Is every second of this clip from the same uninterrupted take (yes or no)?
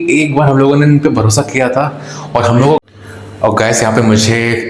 no